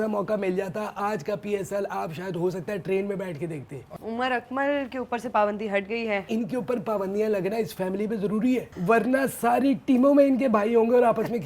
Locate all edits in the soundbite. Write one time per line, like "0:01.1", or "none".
0:03.9
0:06.3
0:08.7